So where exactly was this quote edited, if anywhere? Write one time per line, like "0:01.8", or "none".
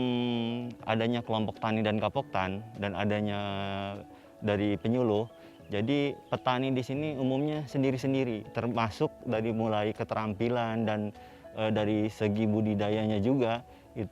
0:08.5